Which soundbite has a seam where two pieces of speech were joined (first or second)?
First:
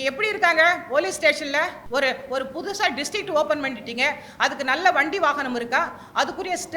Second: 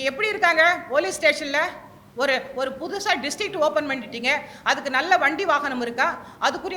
first